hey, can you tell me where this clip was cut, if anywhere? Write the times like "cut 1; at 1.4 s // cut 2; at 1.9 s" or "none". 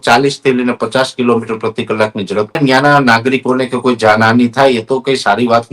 cut 1; at 2.5 s